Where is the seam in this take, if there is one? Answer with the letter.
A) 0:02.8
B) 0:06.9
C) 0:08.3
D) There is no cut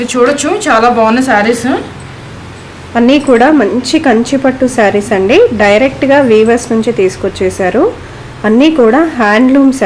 D